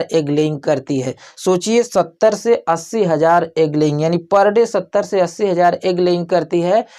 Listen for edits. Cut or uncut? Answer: cut